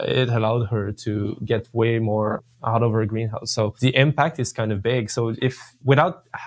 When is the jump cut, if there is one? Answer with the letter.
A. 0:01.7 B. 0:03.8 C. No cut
B